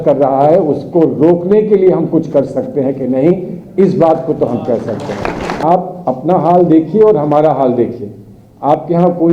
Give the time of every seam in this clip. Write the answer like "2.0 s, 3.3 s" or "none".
5.6 s